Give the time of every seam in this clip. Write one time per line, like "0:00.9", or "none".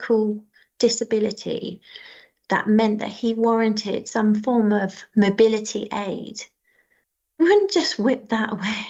none